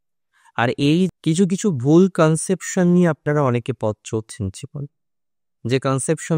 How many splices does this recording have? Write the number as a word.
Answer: one